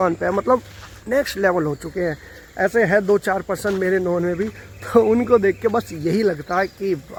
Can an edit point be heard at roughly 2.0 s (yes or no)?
no